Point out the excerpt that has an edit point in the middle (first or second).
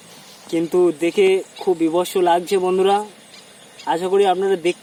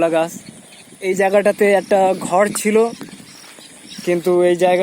second